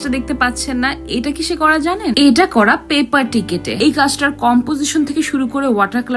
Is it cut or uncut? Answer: cut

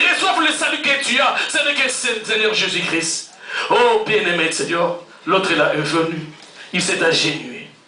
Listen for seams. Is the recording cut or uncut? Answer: uncut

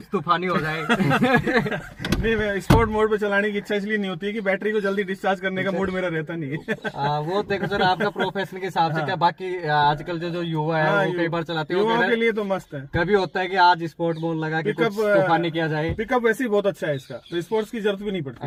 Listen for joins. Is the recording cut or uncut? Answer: uncut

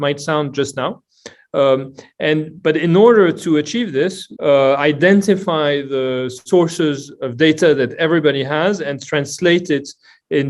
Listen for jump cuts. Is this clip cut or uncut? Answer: cut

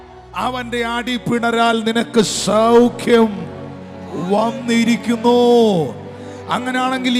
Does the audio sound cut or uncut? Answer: uncut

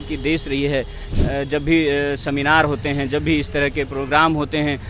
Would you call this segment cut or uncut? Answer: cut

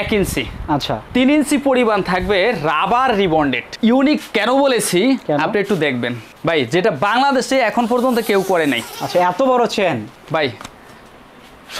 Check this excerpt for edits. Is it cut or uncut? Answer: cut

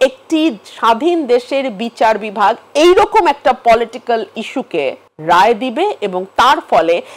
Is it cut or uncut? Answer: cut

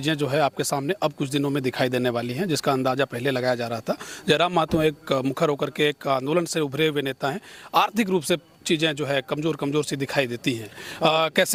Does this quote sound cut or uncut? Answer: uncut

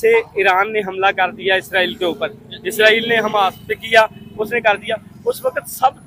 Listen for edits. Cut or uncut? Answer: uncut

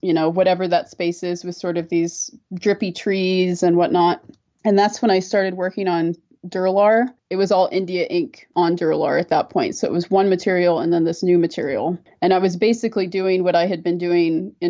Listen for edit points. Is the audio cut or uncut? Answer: uncut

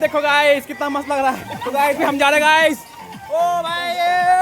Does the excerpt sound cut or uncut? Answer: cut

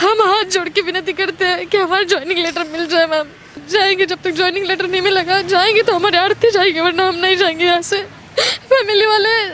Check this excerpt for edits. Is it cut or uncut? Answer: cut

